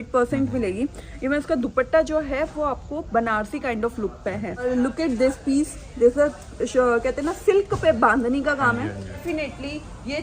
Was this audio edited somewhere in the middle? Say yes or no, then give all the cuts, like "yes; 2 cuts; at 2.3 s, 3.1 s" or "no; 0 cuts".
yes; 2 cuts; at 4.7 s, 9.2 s